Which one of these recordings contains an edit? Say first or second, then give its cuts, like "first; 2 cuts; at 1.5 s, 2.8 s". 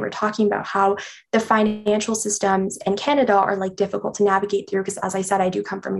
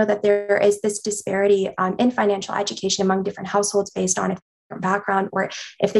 second; 1 cut; at 4.5 s